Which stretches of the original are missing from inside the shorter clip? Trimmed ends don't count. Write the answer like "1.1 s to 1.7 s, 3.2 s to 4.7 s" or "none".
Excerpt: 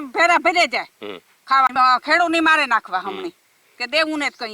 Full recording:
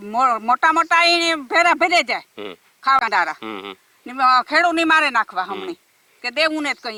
3.0 s to 4.1 s

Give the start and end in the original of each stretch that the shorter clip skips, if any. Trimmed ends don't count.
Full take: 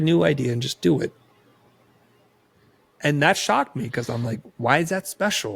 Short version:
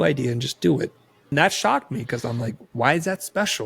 1.5 s to 3.2 s

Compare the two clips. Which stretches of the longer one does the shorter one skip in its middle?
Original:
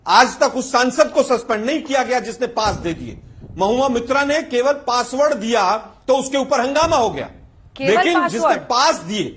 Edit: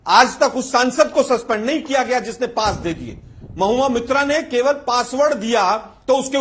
none

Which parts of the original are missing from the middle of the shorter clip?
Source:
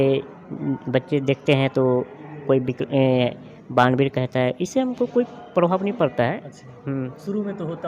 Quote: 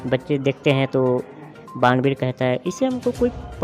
2.3 s to 3.4 s

